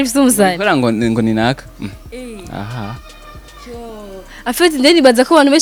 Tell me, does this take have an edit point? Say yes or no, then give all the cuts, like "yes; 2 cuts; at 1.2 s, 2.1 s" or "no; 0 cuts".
no; 0 cuts